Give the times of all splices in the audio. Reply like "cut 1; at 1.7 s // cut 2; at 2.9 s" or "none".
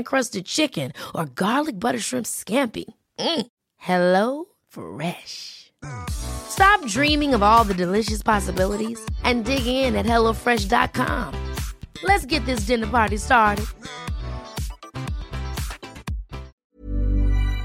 cut 1; at 16.6 s